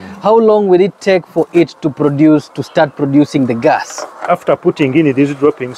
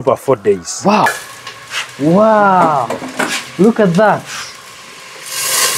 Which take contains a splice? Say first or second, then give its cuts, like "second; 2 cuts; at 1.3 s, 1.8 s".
second; 1 cut; at 1.2 s